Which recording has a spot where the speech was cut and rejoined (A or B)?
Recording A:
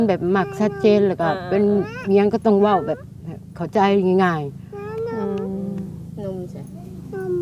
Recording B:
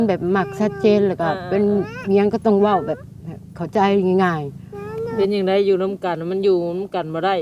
B